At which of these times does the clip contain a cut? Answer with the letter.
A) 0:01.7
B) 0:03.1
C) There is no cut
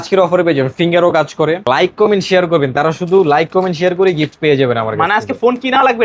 A